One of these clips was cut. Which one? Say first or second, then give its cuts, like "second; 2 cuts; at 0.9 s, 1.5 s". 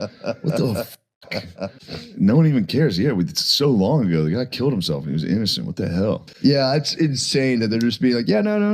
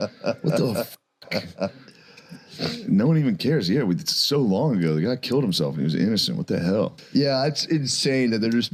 first; 1 cut; at 2.1 s